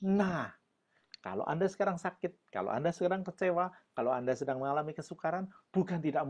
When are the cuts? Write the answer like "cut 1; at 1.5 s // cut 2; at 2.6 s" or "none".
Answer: none